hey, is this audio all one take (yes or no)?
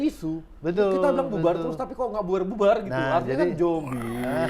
yes